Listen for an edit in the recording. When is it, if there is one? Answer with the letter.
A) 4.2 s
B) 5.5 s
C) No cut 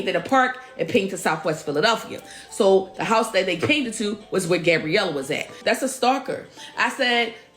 B